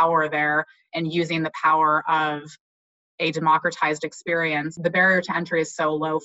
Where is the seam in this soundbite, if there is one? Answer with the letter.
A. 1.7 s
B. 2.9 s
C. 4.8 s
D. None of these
C